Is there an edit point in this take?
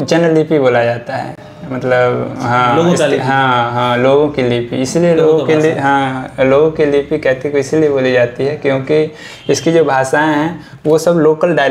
no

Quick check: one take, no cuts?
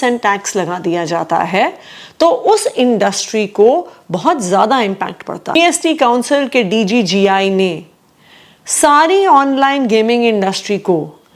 no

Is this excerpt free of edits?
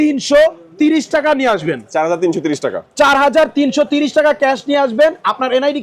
yes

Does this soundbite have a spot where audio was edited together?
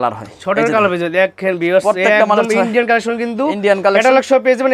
no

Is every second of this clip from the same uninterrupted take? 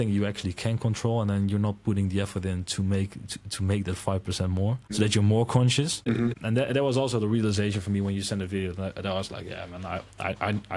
no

